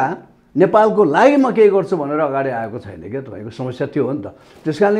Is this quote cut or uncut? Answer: uncut